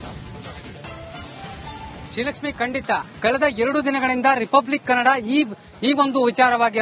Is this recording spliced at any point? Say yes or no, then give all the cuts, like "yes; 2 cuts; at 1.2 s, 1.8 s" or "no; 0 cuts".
yes; 1 cut; at 2.1 s